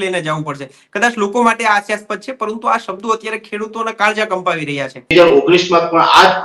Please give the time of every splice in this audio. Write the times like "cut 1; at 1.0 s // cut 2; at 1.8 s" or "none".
cut 1; at 5.1 s